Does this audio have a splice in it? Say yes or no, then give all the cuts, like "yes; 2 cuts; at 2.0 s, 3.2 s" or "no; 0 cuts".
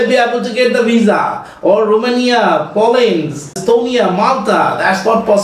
yes; 1 cut; at 3.6 s